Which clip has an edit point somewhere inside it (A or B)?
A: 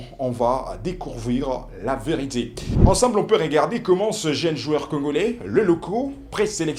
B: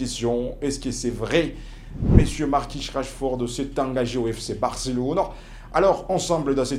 A